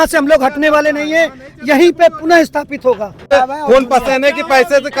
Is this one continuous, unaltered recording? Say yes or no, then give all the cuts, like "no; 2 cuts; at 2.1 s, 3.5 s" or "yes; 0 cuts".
no; 1 cut; at 3.3 s